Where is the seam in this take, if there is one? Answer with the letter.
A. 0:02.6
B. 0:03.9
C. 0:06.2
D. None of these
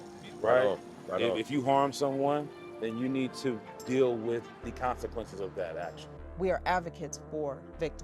C